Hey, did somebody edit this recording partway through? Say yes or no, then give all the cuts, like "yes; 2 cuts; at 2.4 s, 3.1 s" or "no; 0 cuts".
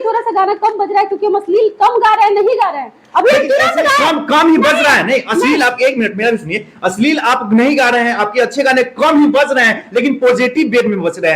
no; 0 cuts